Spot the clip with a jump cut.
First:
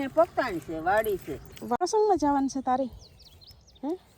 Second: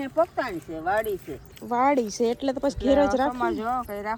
first; 1 cut; at 1.8 s

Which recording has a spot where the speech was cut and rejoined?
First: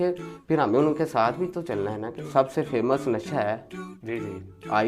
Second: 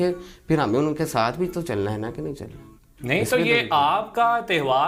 first; 1 cut; at 2.2 s

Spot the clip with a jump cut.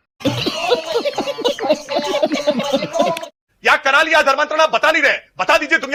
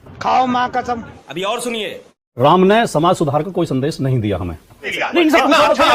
second; 2 cuts; at 1.2 s, 5.0 s

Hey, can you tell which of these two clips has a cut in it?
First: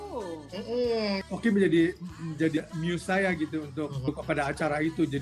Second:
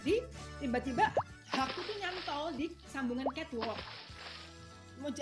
first; 3 cuts; at 1.2 s, 2.6 s, 4.1 s

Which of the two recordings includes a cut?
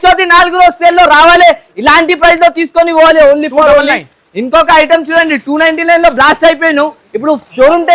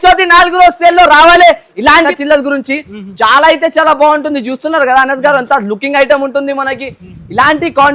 second; 1 cut; at 2.1 s

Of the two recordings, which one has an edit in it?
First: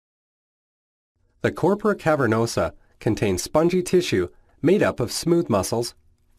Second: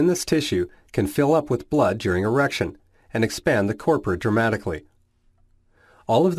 first; 1 cut; at 2.0 s

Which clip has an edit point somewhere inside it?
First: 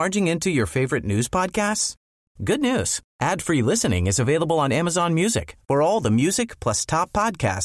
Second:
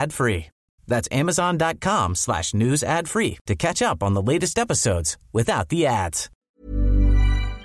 second; 1 cut; at 6.3 s

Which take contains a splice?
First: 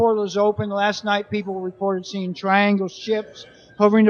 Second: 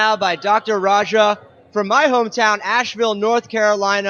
second; 1 cut; at 1.2 s

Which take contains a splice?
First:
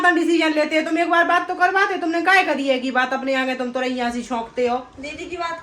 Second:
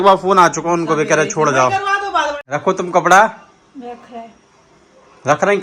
second; 1 cut; at 2.5 s

